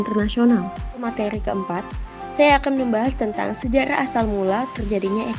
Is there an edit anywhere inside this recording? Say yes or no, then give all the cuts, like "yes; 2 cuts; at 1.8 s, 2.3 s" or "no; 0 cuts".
yes; 1 cut; at 1.0 s